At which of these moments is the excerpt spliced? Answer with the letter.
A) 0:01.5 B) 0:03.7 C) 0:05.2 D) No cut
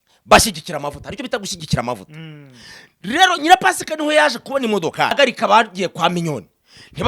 C